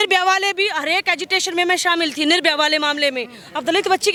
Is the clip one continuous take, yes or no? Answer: yes